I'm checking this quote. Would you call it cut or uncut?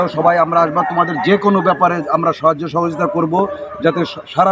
uncut